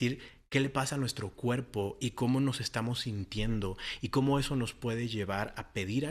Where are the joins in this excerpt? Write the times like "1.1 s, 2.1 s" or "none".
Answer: none